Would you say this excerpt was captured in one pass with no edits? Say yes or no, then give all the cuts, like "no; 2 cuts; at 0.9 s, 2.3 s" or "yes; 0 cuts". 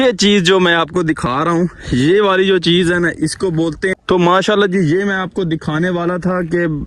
no; 1 cut; at 3.9 s